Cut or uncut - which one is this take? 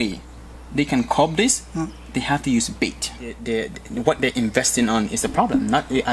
cut